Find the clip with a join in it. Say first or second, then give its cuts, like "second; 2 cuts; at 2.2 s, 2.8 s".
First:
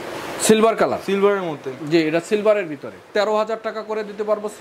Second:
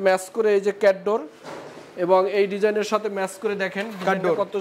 first; 1 cut; at 3.1 s